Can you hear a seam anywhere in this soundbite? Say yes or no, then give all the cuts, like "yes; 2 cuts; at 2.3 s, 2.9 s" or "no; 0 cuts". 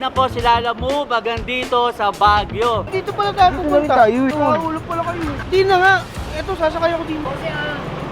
yes; 1 cut; at 2.9 s